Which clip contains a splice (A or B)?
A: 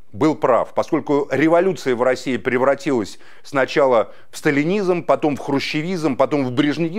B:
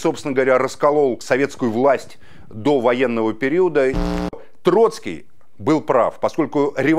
B